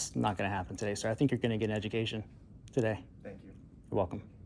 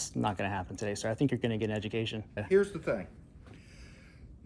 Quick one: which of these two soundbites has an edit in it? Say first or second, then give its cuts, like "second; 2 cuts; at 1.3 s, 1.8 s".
second; 1 cut; at 2.4 s